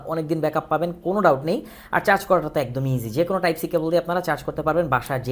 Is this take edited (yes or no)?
no